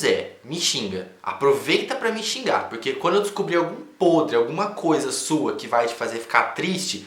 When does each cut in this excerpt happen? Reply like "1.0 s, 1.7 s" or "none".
none